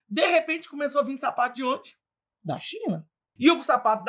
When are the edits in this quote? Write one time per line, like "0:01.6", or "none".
0:03.2